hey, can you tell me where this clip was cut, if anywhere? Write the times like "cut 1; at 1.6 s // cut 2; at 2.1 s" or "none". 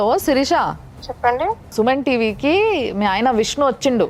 none